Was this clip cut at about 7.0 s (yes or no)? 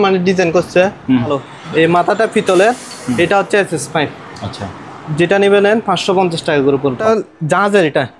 yes